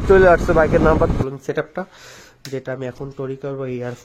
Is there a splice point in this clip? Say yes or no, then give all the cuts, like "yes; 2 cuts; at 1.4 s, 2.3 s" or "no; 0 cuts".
yes; 1 cut; at 1.2 s